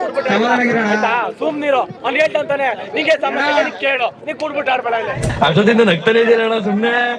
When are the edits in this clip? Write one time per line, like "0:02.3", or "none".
0:05.3